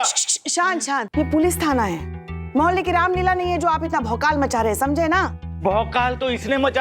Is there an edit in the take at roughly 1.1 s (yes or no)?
yes